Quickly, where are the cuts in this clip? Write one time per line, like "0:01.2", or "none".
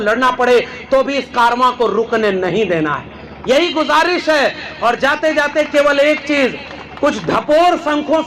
none